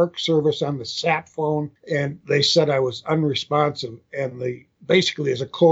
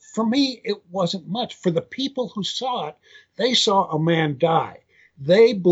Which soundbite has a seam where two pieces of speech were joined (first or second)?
first